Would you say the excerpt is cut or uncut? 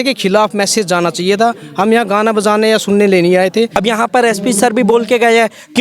cut